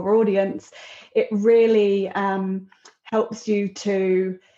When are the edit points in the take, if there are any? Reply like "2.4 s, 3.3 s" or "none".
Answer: none